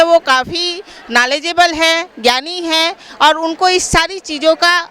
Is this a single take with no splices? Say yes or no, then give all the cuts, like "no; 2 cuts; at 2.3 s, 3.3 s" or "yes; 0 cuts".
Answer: yes; 0 cuts